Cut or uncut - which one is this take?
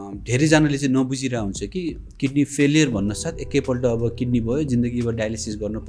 uncut